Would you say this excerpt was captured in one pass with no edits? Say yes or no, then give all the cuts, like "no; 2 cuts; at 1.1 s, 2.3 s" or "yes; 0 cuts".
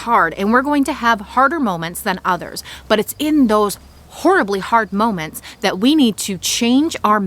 yes; 0 cuts